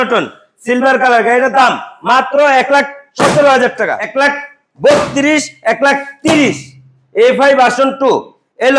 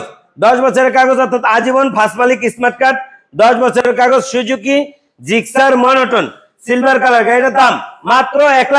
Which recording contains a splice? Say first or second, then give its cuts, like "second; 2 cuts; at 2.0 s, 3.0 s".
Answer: first; 1 cut; at 4.0 s